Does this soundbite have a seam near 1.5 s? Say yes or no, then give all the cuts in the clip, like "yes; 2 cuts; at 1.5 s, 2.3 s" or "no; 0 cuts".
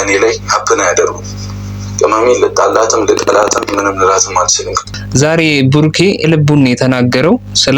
no; 2 cuts; at 5.0 s, 6.2 s